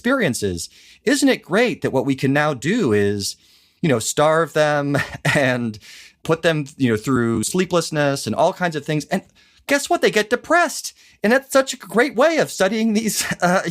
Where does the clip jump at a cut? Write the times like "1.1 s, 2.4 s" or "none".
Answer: 6.1 s